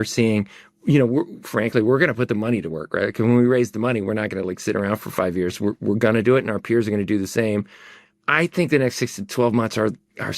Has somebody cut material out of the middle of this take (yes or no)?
yes